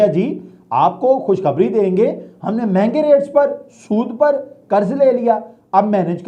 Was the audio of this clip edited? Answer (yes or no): no